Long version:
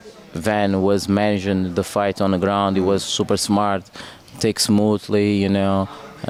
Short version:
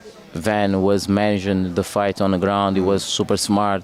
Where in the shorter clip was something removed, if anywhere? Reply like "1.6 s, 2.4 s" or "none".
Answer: none